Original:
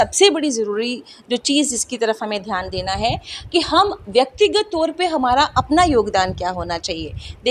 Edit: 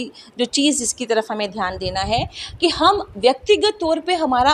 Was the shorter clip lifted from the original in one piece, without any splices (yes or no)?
yes